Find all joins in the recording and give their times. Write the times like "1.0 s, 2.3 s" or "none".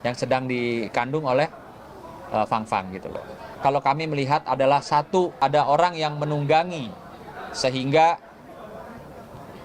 3.4 s, 5.4 s